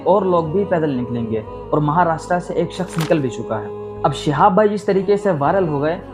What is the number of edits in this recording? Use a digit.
0